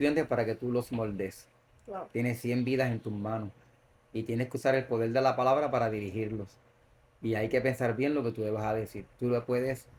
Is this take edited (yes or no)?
no